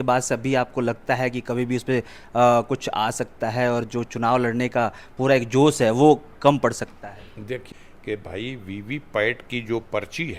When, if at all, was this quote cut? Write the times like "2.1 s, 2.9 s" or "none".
7.6 s